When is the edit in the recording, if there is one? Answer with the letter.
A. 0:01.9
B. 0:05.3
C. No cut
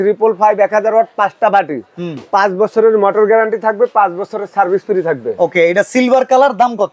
C